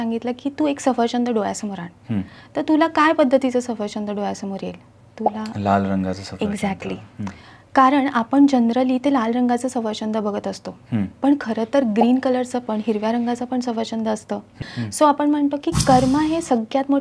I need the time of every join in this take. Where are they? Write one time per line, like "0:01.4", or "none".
0:14.5